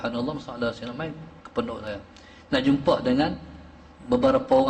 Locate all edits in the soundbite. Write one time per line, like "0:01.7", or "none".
none